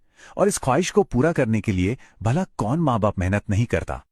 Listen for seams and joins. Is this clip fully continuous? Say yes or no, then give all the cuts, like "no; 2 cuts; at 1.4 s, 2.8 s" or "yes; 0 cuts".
yes; 0 cuts